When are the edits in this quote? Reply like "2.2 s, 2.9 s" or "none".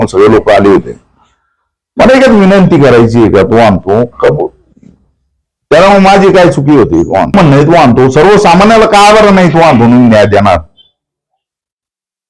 7.3 s

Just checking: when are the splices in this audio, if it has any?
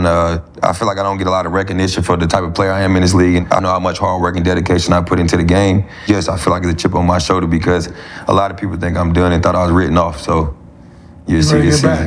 3.5 s, 6.0 s

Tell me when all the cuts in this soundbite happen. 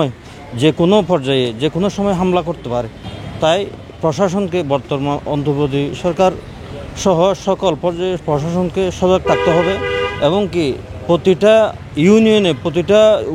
none

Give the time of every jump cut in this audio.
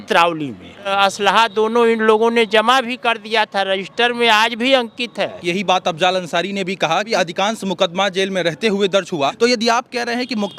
0.9 s, 5.4 s, 7.1 s, 9.3 s

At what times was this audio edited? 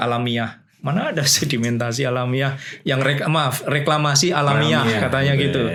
none

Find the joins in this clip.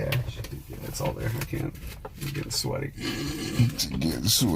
0.9 s

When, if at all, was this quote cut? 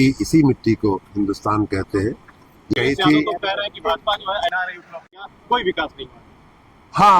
2.7 s

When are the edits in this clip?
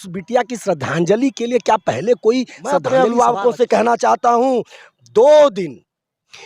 2.8 s

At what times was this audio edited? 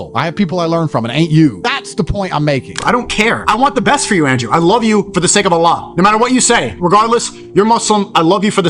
2.8 s

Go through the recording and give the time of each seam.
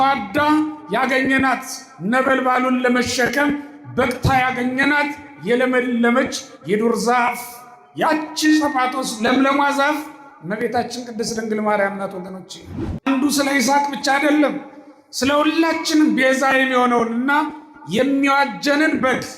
13.0 s

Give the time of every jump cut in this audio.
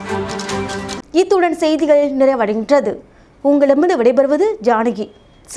none

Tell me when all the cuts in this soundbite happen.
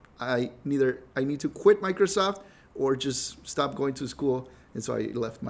none

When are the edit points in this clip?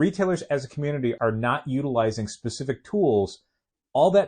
1.2 s

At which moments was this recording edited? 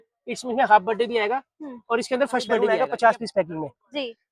2.7 s

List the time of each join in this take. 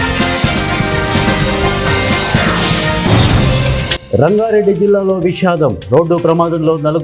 4.0 s

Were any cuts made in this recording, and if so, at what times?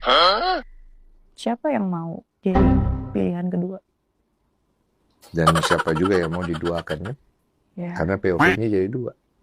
none

